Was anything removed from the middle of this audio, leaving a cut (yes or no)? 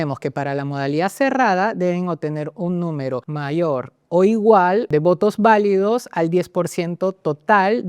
yes